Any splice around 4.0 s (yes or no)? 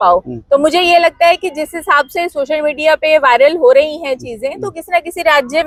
no